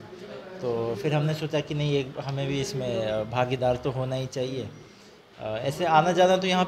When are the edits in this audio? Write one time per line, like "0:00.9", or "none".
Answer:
none